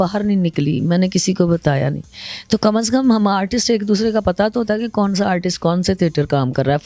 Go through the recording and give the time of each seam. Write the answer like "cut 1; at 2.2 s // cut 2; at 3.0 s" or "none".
none